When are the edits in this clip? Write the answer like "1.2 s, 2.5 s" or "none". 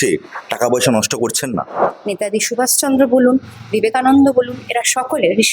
1.9 s